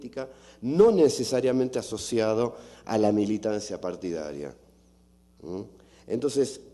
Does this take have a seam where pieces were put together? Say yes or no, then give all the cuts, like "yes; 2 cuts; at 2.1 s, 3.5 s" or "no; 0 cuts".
no; 0 cuts